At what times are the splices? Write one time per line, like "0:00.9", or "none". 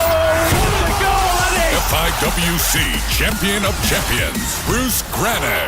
0:04.3